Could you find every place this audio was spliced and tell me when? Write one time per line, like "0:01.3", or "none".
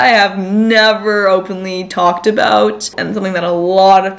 none